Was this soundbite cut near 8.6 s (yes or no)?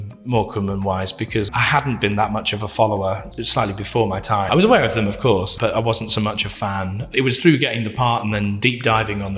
yes